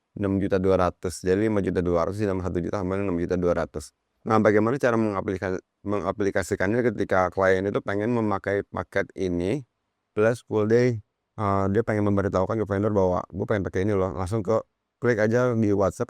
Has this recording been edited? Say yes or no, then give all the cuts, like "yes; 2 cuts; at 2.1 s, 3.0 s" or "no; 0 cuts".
yes; 1 cut; at 14.8 s